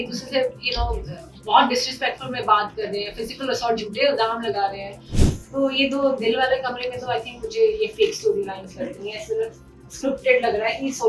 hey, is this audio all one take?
no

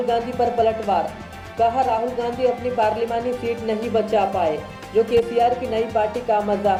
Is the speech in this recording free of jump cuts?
yes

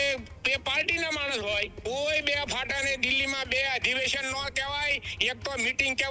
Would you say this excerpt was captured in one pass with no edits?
no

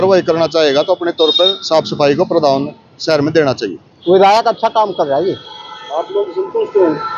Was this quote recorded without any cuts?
no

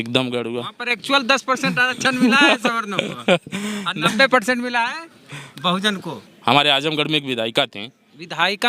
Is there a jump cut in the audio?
yes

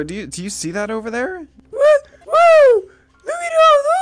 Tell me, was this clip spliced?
no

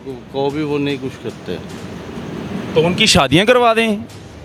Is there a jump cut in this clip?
no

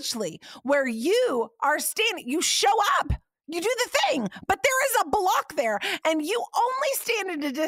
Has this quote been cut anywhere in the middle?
no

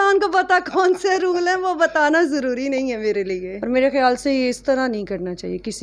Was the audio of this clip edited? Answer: yes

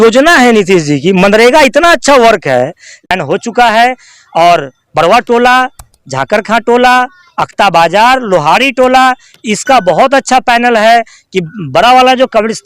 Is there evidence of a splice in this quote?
yes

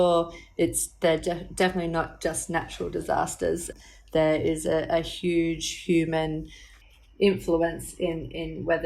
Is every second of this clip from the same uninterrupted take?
no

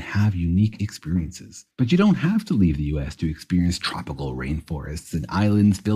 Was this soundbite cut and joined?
no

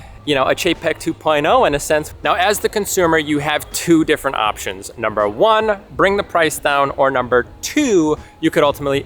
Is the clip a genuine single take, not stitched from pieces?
yes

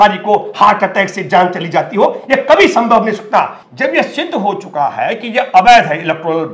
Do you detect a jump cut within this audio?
yes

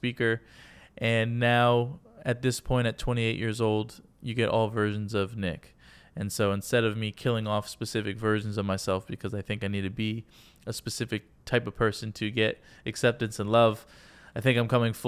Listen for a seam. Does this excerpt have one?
no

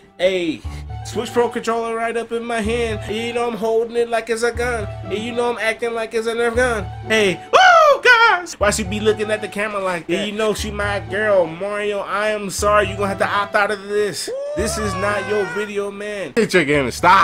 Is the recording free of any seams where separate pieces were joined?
no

